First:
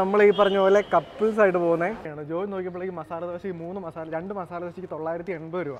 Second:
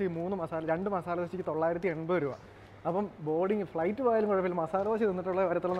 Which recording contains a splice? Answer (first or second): first